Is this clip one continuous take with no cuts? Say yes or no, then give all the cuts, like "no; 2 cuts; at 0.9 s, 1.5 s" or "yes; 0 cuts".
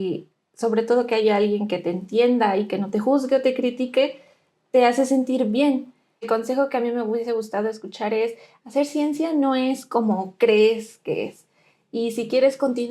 no; 1 cut; at 6.3 s